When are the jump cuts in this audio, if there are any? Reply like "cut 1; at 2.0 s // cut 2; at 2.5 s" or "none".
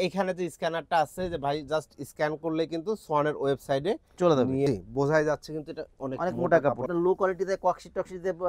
cut 1; at 4.7 s // cut 2; at 6.9 s